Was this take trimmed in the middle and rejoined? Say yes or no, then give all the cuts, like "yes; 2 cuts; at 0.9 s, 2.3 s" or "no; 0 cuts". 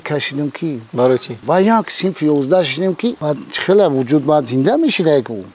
yes; 2 cuts; at 1.4 s, 3.2 s